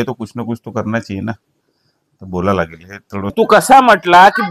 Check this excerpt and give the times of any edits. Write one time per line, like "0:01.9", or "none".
0:03.3